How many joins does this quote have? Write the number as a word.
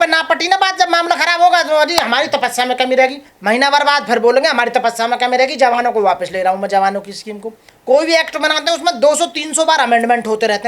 two